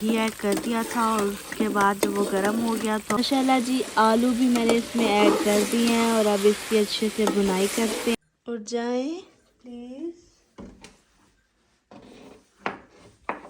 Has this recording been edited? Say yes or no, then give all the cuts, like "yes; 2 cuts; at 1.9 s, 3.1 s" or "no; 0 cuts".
yes; 2 cuts; at 3.4 s, 8.1 s